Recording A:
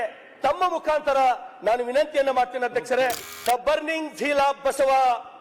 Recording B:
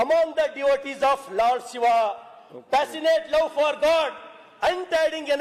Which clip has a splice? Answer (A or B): A